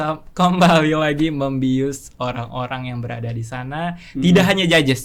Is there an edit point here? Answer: no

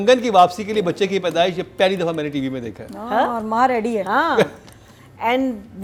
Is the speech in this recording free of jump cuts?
yes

